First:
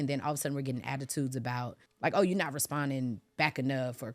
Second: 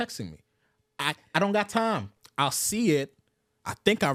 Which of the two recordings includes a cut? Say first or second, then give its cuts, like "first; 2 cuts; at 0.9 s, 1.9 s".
first; 1 cut; at 1.8 s